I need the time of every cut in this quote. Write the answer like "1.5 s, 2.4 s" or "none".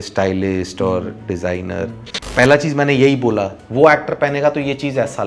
2.2 s, 3.6 s